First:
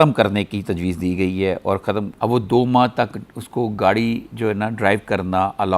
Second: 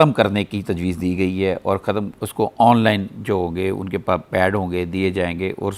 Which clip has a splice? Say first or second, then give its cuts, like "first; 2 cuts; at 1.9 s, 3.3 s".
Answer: first; 1 cut; at 2.1 s